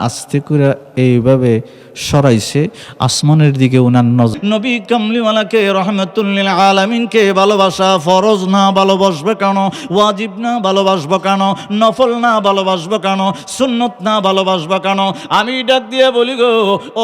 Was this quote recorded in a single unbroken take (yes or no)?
no